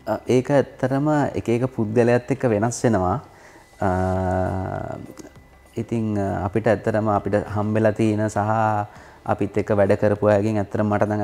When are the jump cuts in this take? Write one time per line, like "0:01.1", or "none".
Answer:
none